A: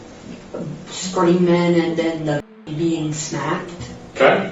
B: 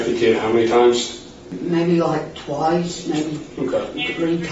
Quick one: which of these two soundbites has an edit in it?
B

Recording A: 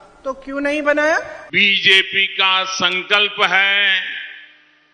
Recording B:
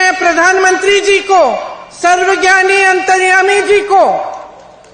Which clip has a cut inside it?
A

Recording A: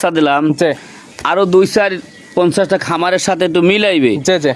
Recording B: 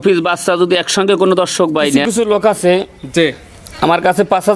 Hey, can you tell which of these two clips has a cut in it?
B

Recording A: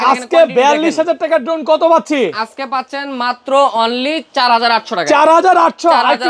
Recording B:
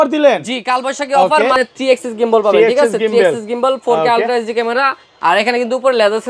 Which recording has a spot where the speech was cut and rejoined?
B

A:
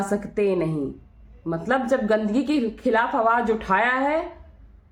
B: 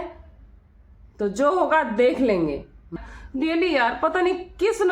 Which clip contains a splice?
B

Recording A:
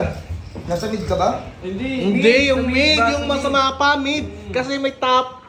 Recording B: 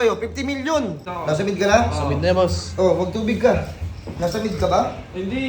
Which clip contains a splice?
B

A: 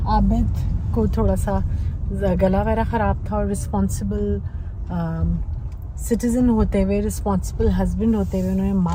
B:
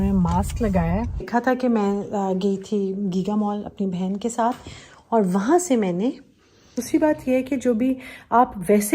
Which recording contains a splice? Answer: B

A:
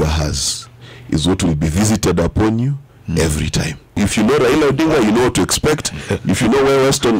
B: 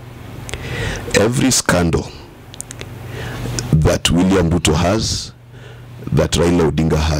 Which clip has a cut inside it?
A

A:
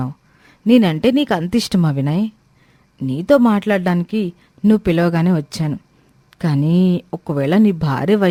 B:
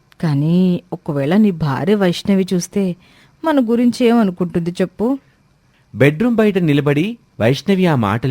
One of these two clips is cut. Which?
B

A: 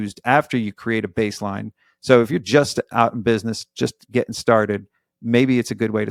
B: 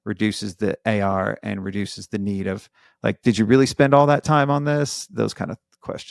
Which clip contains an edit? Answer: B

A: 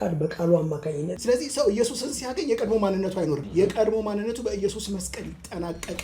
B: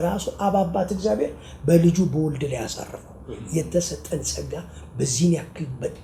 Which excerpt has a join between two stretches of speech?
A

